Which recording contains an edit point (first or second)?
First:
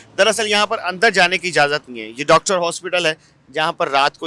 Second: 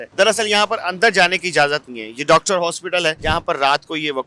second